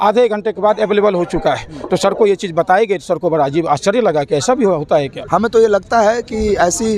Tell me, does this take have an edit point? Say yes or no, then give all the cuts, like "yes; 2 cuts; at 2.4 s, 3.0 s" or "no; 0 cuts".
yes; 1 cut; at 5.2 s